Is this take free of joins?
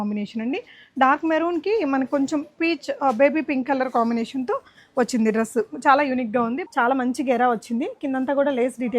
no; 1 cut; at 6.6 s

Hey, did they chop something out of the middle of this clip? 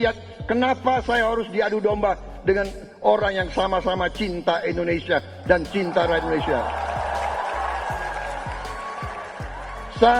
no; 0 cuts

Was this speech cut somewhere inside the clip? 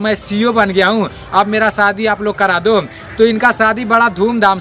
no; 0 cuts

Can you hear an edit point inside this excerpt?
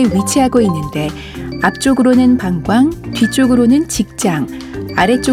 no; 0 cuts

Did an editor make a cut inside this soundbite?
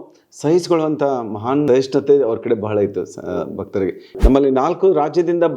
yes; 2 cuts; at 1.7 s, 4.0 s

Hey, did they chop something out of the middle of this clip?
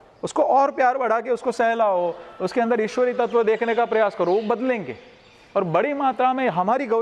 no; 0 cuts

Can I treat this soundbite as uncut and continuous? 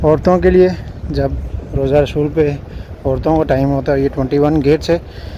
yes; 0 cuts

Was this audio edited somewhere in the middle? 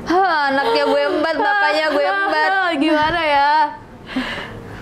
no; 0 cuts

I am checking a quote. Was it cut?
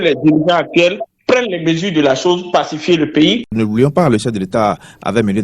yes; 1 cut; at 3.4 s

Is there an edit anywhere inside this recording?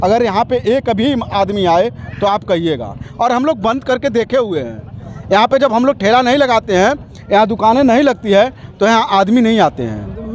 no; 0 cuts

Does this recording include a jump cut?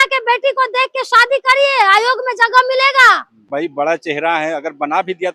yes; 1 cut; at 3.5 s

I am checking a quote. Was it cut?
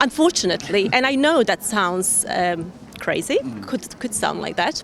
no; 0 cuts

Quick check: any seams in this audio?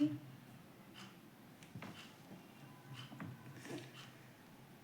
yes; 1 cut; at 3.9 s

